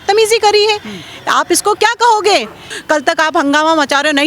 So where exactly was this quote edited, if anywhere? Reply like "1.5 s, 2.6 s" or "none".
2.7 s